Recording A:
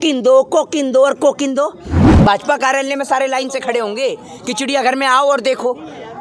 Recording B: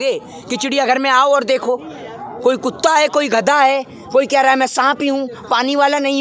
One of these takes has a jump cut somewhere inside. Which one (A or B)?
A